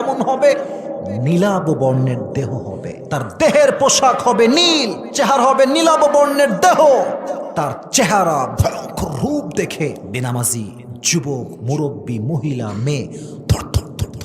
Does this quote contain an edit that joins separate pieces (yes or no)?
yes